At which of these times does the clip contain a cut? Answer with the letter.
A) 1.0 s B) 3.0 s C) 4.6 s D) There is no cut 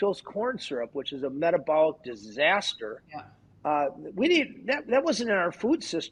D